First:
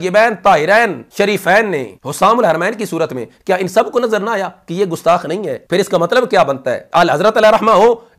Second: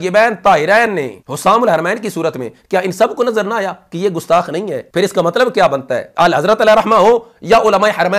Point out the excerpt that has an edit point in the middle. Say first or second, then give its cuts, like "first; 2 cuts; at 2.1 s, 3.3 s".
second; 1 cut; at 0.9 s